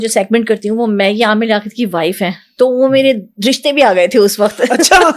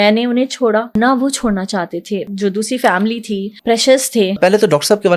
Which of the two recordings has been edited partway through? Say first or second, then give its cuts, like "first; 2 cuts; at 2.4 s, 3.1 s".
second; 4 cuts; at 0.9 s, 2.3 s, 3.5 s, 4.4 s